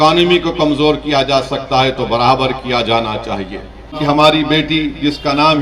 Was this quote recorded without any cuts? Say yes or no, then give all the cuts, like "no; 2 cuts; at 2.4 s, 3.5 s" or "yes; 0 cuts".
no; 1 cut; at 4.0 s